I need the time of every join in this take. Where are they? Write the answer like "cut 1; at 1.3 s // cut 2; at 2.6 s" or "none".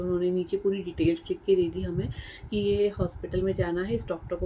none